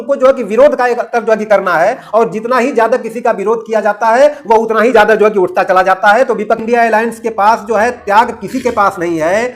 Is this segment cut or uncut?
cut